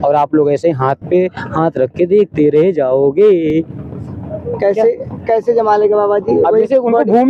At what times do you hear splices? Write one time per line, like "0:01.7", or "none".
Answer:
none